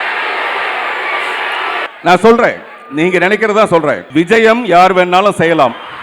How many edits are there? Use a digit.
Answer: 2